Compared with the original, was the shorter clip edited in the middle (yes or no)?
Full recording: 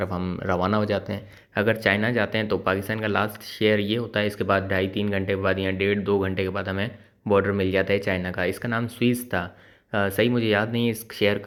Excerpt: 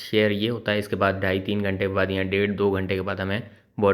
no